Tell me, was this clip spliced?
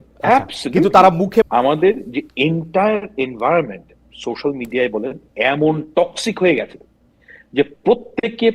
yes; 1 cut; at 1.5 s

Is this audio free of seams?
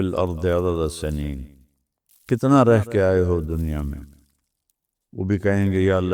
yes; 0 cuts

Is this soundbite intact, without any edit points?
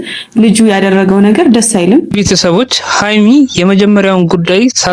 yes; 0 cuts

